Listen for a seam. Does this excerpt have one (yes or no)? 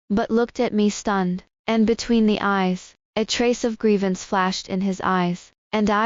no